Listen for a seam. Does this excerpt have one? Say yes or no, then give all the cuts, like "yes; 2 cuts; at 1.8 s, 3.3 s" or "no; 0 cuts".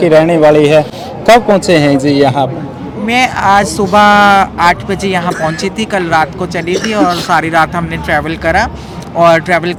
no; 0 cuts